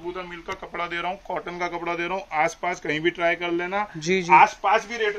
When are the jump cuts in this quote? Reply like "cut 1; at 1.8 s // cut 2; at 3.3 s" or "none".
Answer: none